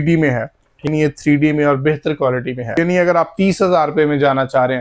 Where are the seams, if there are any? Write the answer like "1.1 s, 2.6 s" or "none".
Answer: 0.9 s, 2.7 s